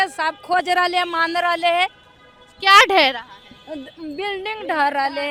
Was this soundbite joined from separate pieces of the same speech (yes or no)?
no